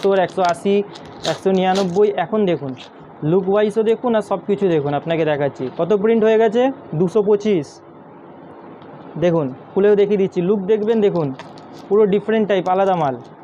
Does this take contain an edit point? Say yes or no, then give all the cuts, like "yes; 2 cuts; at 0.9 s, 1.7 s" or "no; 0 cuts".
no; 0 cuts